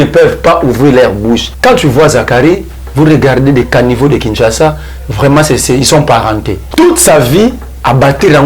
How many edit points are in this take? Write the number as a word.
two